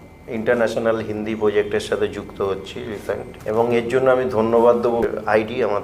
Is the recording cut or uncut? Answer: cut